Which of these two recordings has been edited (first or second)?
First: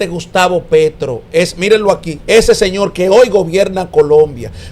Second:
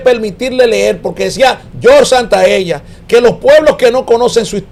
first